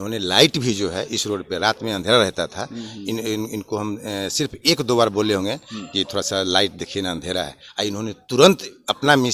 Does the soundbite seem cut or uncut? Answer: uncut